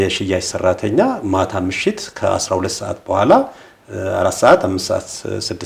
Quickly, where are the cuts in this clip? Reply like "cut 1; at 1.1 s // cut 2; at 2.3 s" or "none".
none

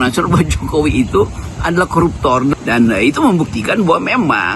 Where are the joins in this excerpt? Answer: cut 1; at 2.6 s

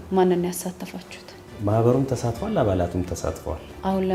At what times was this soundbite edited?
none

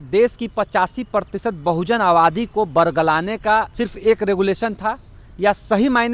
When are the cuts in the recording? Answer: cut 1; at 3.7 s

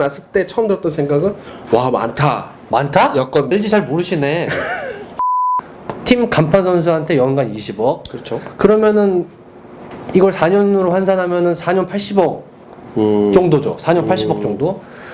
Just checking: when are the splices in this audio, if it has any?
cut 1; at 3.5 s // cut 2; at 5.3 s

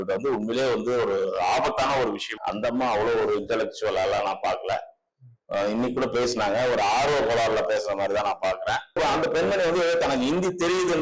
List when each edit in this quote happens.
cut 1; at 2.4 s // cut 2; at 9.0 s

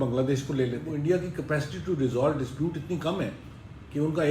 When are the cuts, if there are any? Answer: cut 1; at 0.9 s

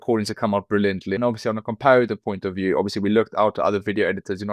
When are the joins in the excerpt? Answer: cut 1; at 1.1 s

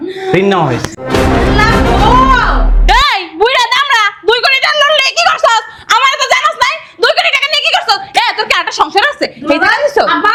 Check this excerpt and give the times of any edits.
none

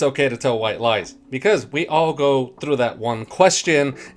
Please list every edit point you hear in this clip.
cut 1; at 1.1 s

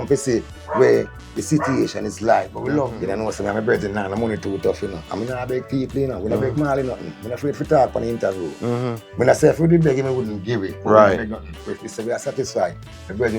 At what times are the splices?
cut 1; at 2.8 s

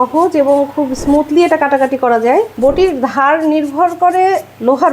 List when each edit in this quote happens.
cut 1; at 2.5 s

